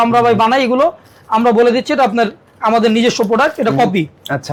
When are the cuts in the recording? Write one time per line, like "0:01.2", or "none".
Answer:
none

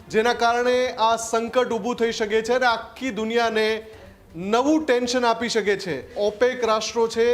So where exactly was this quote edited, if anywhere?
0:06.1

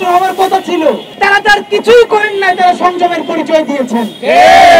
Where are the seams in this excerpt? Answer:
0:01.1

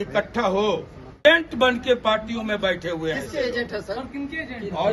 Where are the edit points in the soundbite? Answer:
0:01.2

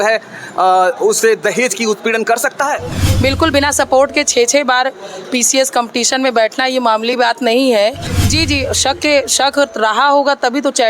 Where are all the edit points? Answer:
0:02.9
0:08.1

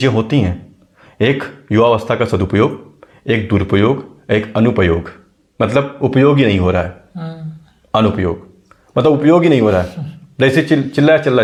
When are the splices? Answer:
none

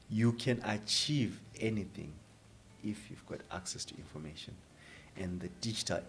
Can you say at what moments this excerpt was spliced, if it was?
none

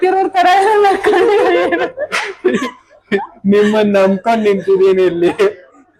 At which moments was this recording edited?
none

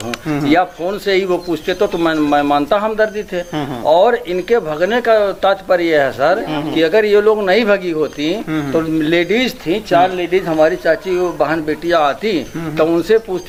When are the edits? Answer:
none

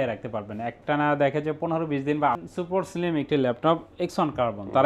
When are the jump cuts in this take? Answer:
0:02.4

